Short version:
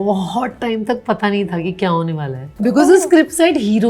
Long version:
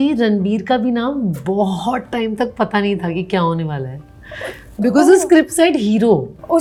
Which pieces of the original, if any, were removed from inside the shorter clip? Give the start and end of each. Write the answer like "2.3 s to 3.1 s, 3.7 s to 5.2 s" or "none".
3.9 s to 4.6 s